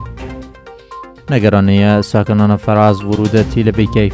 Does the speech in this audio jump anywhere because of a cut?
yes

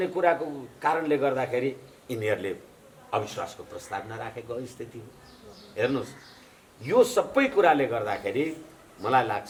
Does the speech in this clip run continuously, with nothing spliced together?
yes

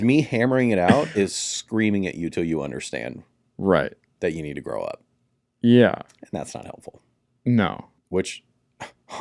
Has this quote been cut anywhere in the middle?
yes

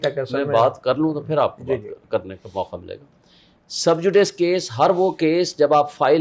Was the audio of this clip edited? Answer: no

